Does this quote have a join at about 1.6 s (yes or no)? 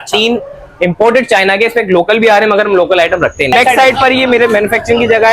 no